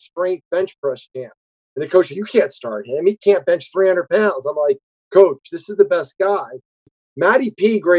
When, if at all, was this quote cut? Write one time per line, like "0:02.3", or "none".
0:06.8

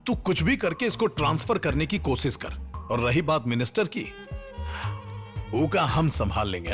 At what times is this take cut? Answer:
none

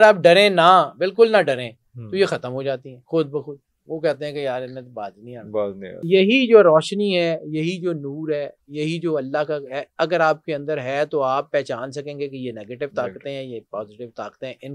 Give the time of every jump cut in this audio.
0:06.1

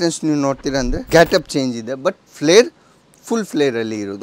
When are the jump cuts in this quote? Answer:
0:01.0

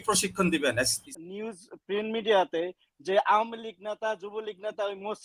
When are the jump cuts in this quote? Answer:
0:01.0

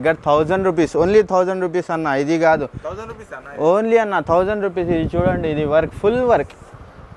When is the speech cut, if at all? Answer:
none

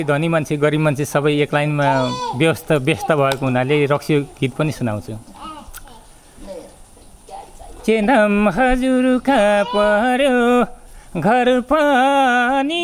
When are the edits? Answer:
none

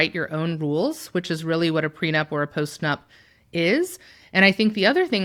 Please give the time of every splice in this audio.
none

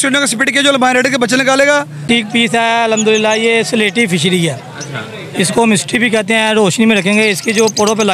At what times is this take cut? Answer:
0:02.0

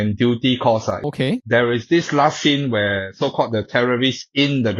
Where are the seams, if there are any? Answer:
0:01.1

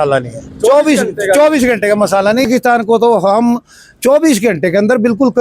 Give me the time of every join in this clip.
0:02.5

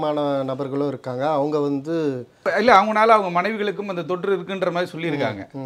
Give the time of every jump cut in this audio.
0:02.5

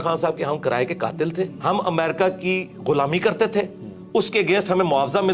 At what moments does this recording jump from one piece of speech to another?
0:01.6

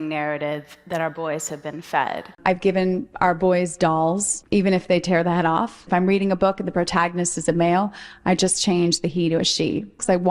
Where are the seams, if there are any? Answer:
0:02.3
0:04.3
0:05.8

